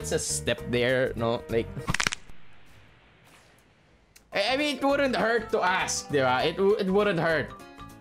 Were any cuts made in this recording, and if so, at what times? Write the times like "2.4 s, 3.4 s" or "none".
4.3 s